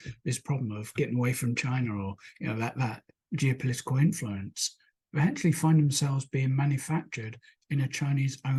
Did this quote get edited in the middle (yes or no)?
no